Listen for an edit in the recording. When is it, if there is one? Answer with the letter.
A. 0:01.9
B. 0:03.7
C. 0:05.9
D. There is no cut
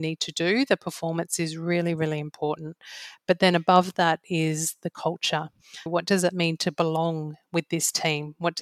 C